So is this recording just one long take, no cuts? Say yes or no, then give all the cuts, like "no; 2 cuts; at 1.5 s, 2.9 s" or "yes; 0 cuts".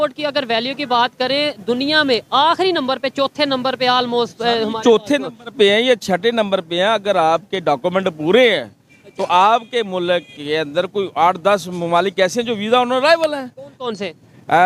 yes; 0 cuts